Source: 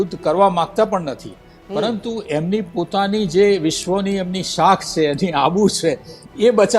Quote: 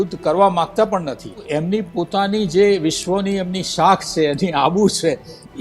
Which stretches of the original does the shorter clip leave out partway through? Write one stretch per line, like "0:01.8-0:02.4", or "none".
0:01.4-0:02.2